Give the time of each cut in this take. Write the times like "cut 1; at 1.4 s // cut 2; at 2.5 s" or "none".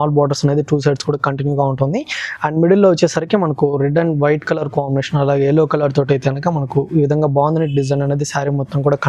none